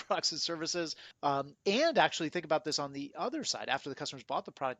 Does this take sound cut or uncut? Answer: cut